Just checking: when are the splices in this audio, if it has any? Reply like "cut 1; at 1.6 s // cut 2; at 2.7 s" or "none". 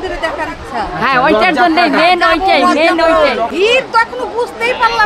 cut 1; at 3.5 s